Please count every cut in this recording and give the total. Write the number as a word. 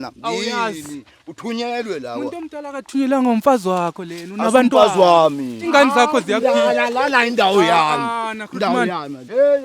one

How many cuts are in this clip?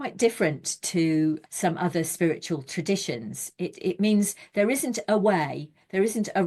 one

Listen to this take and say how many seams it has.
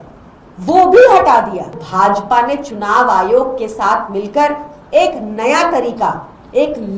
one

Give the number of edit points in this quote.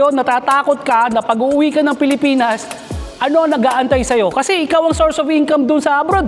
zero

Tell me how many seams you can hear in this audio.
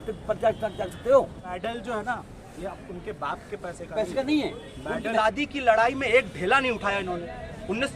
two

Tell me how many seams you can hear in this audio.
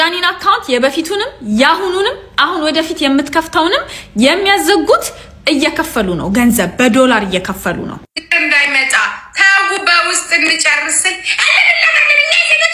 zero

